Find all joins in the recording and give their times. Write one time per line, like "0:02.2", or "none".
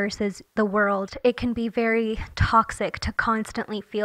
0:01.1